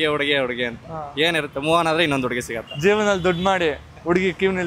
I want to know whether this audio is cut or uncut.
uncut